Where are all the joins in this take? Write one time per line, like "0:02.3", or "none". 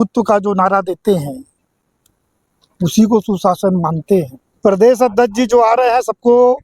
0:04.4